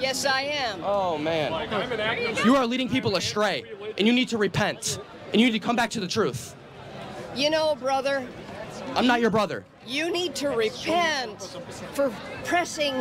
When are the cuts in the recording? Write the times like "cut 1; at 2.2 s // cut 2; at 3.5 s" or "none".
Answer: none